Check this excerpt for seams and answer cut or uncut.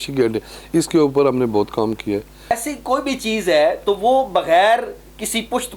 cut